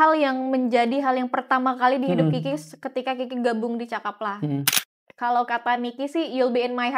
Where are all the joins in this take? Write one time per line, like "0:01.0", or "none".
0:04.7